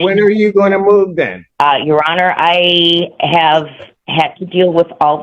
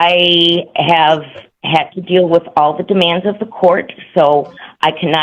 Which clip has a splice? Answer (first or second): first